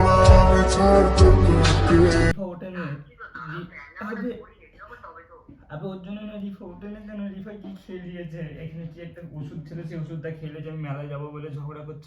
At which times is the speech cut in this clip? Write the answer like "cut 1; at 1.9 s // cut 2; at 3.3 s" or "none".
cut 1; at 2.3 s